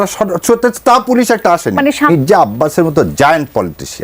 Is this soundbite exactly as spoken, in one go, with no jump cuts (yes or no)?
no